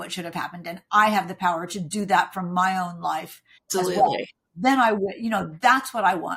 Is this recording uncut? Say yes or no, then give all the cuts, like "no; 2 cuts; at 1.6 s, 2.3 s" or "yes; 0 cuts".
yes; 0 cuts